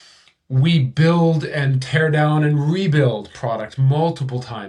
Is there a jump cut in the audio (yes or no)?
no